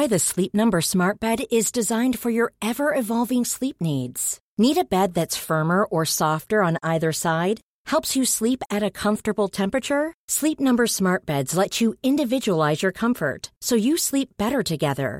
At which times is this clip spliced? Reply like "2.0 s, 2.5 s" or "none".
none